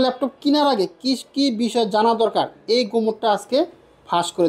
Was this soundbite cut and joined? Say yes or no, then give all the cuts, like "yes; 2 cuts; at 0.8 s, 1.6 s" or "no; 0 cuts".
no; 0 cuts